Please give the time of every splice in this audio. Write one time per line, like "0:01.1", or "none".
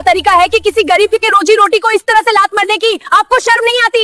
none